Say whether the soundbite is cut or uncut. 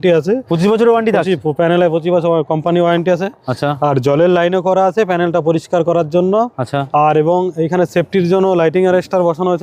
uncut